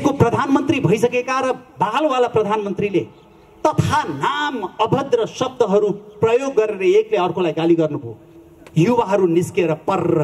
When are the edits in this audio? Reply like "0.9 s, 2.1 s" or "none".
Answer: none

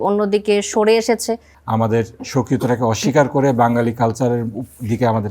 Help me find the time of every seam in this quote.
1.5 s

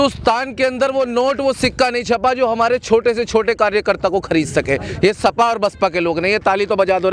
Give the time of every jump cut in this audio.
none

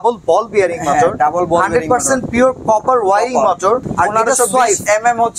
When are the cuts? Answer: 3.9 s

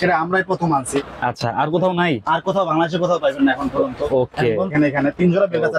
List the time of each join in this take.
4.7 s

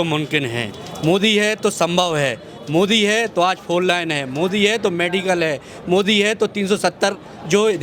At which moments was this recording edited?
none

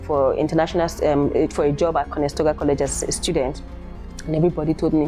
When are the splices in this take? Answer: none

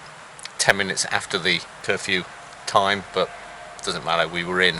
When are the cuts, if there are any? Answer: 1.7 s

